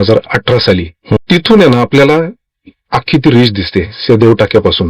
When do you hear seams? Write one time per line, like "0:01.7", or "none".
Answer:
0:01.2